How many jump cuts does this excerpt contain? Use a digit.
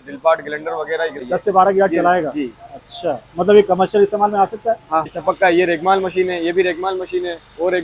2